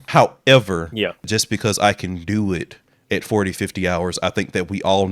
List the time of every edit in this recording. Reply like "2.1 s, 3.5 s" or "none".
1.2 s

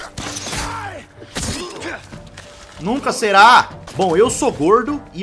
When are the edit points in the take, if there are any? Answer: 3.8 s

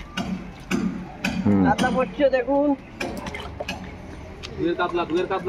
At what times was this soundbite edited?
none

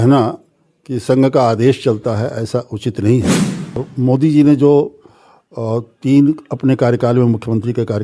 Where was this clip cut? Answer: 3.9 s

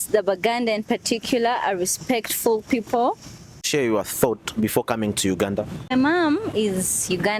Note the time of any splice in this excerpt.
3.7 s, 5.9 s

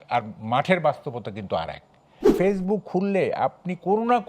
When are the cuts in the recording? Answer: 2.3 s

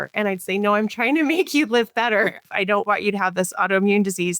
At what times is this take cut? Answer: 2.4 s

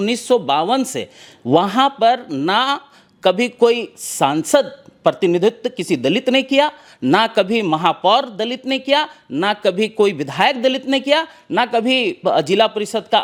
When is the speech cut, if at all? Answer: none

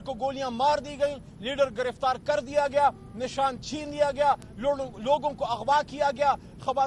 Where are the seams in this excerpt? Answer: none

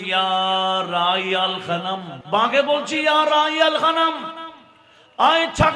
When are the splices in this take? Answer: 2.1 s

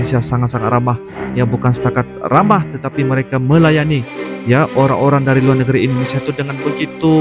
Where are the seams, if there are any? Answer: none

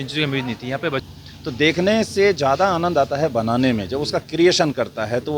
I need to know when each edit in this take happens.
1.0 s

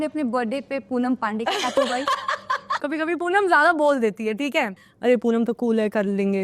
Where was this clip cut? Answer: 2.8 s, 4.8 s

